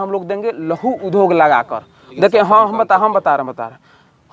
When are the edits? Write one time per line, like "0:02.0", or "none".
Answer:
0:02.0